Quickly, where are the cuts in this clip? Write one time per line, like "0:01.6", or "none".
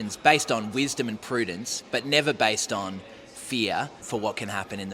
0:04.0